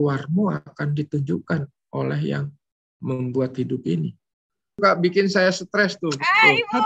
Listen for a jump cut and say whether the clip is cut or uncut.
cut